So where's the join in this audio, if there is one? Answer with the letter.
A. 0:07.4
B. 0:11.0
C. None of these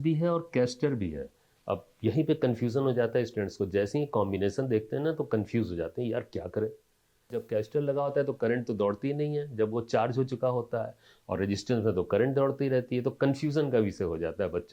A